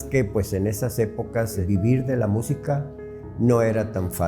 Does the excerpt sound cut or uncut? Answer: cut